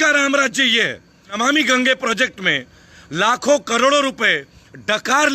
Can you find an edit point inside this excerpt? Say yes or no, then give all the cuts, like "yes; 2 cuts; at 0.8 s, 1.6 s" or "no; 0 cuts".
yes; 1 cut; at 1.3 s